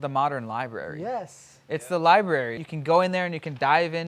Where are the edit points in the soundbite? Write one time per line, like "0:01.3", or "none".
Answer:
0:02.6